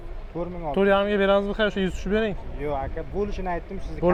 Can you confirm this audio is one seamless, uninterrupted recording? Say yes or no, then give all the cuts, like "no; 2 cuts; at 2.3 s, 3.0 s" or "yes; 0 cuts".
yes; 0 cuts